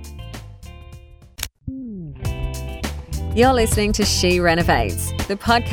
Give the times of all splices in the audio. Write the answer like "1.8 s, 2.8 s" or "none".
1.5 s